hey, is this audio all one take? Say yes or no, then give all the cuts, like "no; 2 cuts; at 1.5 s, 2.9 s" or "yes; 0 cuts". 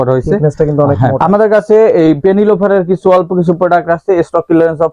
no; 1 cut; at 1.2 s